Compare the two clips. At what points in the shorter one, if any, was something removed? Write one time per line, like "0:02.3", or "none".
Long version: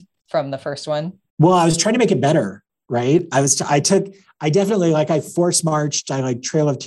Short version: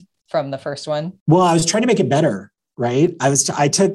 0:01.1

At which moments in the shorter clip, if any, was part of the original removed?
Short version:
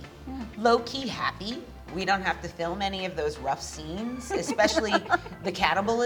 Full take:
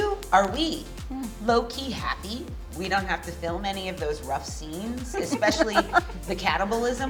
none

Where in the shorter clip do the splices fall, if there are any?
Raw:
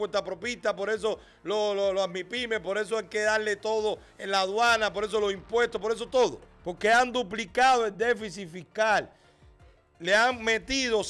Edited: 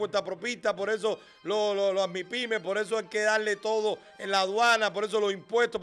none

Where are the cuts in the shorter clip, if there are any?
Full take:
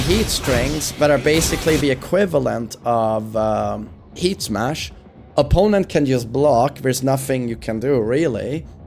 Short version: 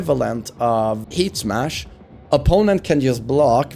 0:01.0

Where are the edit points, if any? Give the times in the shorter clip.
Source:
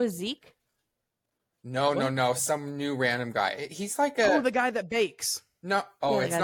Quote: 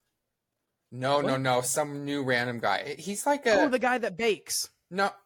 none

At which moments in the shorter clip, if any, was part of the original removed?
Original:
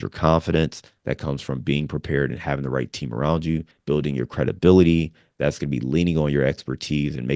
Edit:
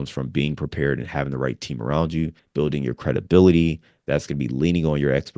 none

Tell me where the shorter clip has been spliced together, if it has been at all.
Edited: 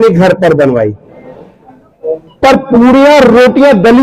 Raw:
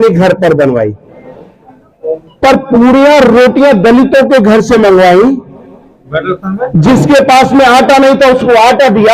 none

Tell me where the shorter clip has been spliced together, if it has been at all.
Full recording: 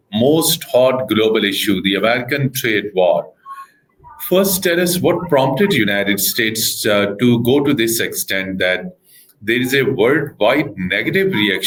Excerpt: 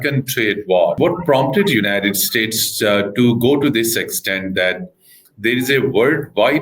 0:01.0

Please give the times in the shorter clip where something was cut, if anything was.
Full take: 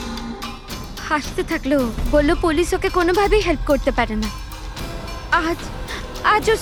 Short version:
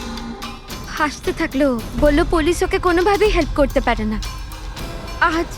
0:00.9

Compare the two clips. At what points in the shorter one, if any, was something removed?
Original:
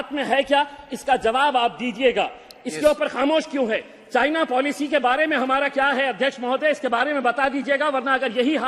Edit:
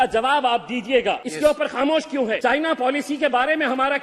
0:01.3
0:02.4

